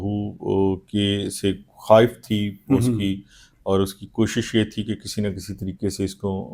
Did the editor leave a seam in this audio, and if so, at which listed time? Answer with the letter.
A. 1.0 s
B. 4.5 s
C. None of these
C